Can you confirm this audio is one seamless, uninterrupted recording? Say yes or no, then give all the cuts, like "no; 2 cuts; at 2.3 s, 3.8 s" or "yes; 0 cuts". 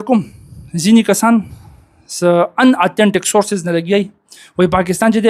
yes; 0 cuts